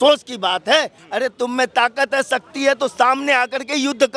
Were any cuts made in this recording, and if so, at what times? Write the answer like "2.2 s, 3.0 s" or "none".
1.0 s